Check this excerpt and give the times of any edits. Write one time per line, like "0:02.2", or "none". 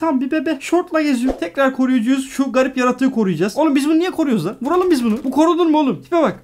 0:01.3